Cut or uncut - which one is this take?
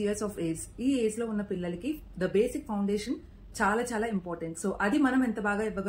uncut